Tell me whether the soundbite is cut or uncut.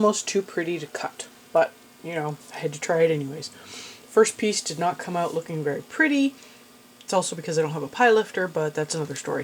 uncut